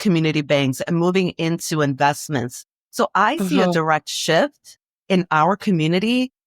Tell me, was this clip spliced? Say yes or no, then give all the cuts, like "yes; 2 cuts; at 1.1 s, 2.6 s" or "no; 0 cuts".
yes; 1 cut; at 2.6 s